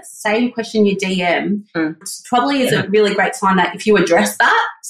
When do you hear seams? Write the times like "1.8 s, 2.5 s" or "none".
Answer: none